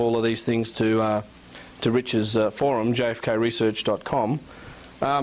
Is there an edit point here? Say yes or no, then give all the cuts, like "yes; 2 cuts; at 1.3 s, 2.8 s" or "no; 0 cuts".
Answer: no; 0 cuts